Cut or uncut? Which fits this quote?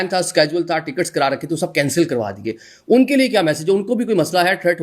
uncut